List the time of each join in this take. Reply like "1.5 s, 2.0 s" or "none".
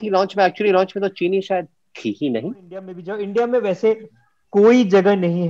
3.0 s